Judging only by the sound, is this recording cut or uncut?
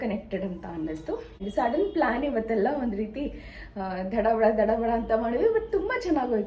cut